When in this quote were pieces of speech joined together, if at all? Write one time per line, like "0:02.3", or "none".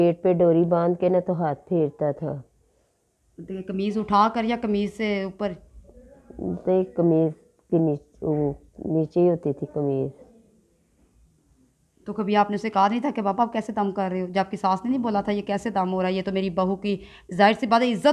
none